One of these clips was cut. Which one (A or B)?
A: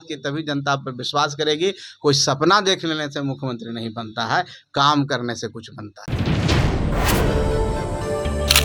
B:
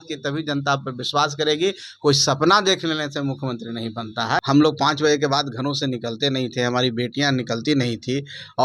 B